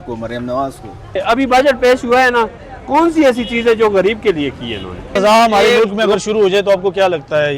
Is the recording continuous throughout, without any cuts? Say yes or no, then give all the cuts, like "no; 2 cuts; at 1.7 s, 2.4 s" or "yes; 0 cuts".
no; 2 cuts; at 1.0 s, 5.1 s